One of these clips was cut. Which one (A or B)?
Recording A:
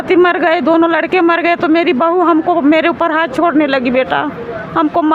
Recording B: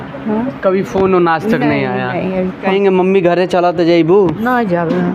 B